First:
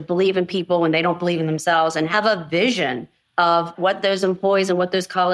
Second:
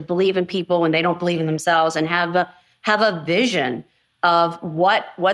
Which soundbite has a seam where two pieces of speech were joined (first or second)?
first